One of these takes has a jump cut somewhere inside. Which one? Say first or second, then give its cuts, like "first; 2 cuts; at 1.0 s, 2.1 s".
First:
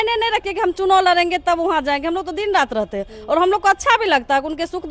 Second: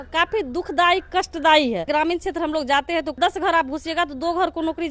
second; 2 cuts; at 1.9 s, 3.2 s